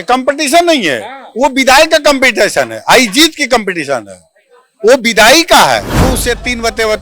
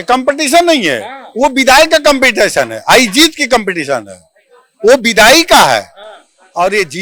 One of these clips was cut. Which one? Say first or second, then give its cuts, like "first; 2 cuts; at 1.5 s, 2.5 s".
first; 1 cut; at 5.9 s